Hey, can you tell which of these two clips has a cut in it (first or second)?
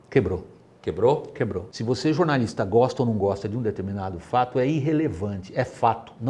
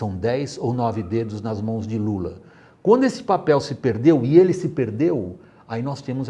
first